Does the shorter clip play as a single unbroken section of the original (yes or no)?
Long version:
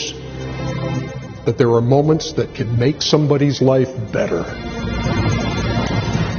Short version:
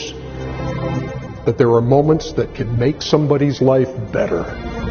yes